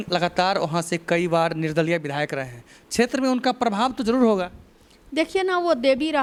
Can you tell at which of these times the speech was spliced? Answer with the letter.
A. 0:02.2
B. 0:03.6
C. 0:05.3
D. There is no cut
D